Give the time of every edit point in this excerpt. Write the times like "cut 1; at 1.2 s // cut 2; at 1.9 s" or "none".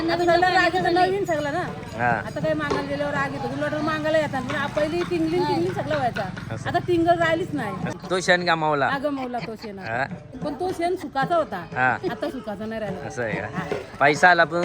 cut 1; at 7.9 s // cut 2; at 10.3 s